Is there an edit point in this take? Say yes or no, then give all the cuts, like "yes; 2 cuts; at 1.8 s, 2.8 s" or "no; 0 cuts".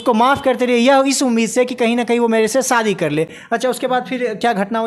no; 0 cuts